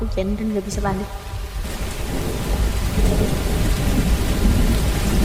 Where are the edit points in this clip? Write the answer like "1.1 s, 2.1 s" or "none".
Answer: none